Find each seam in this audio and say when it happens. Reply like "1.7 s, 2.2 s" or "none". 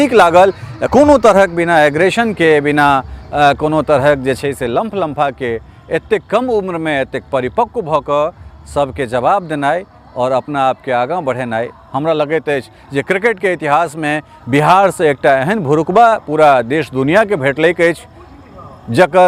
none